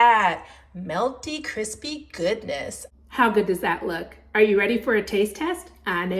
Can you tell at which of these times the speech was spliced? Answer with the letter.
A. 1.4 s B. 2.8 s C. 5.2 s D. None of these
B